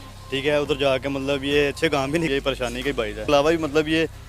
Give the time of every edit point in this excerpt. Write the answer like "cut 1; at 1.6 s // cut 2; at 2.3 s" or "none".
cut 1; at 3.2 s